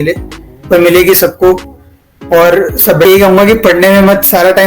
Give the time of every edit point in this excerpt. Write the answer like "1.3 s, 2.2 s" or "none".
3.1 s